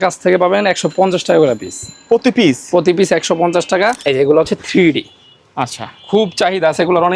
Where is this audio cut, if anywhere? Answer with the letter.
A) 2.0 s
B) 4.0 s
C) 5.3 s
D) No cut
B